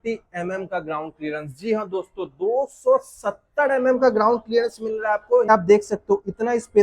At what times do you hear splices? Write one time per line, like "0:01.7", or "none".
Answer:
0:05.5